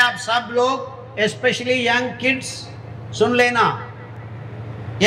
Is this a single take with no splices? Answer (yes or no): yes